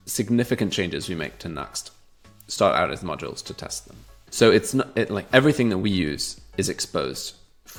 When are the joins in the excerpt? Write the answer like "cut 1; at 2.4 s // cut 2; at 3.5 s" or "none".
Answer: none